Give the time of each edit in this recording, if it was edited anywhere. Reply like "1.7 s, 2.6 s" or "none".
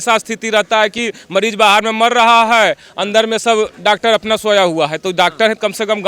none